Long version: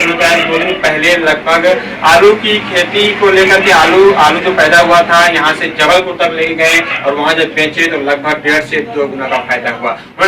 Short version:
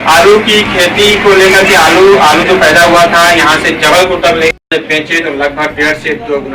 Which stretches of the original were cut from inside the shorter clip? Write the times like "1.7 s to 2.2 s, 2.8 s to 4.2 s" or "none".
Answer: 6.6 s to 7.3 s